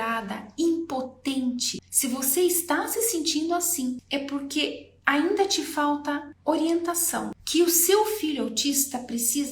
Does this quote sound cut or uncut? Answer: cut